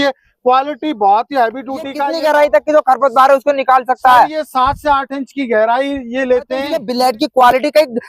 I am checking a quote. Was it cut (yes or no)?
yes